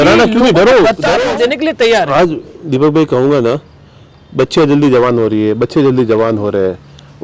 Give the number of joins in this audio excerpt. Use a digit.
1